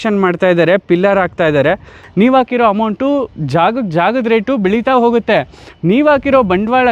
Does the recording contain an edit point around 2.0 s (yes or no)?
yes